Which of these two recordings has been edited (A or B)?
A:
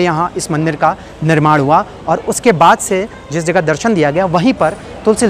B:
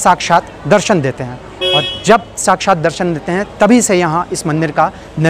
B